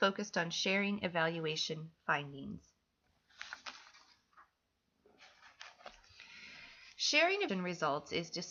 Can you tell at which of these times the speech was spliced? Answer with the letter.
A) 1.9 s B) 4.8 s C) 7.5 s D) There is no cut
D